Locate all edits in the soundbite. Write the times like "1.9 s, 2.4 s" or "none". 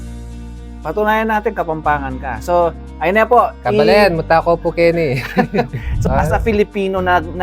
5.9 s